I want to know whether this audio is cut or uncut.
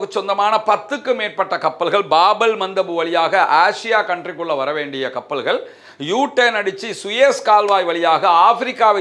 uncut